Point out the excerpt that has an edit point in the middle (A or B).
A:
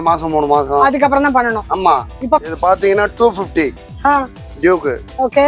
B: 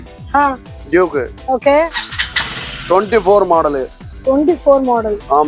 A